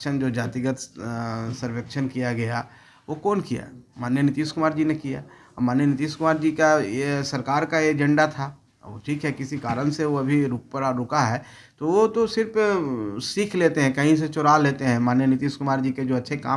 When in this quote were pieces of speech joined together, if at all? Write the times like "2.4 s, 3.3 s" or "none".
none